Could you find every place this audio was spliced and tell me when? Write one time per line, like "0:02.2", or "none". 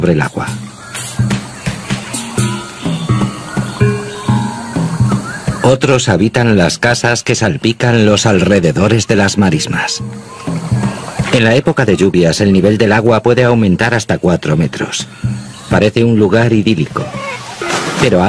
0:13.3